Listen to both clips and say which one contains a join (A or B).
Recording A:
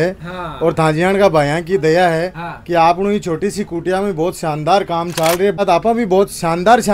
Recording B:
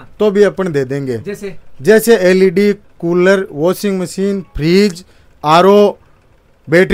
A